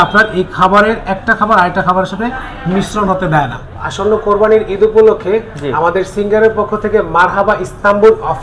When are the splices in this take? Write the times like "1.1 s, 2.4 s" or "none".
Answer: 3.6 s